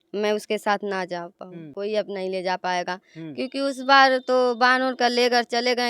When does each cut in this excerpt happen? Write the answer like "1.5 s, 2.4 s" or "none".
1.7 s

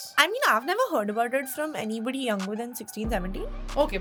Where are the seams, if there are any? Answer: none

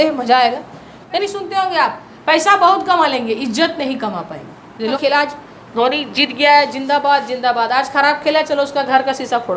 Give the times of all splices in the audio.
1.2 s, 4.9 s

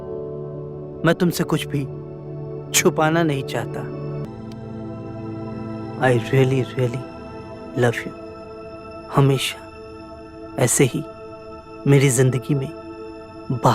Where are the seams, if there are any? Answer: 4.2 s

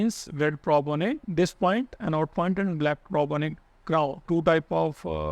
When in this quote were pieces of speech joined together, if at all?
1.2 s, 4.2 s

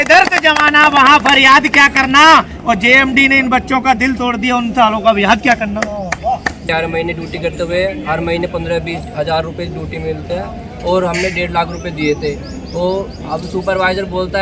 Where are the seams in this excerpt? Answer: 6.6 s

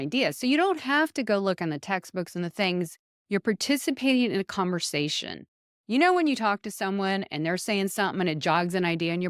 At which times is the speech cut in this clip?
none

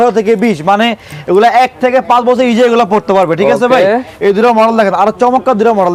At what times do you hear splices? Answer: none

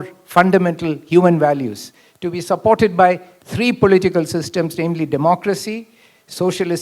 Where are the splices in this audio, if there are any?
none

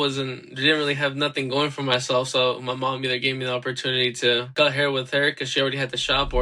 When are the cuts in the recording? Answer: 4.5 s

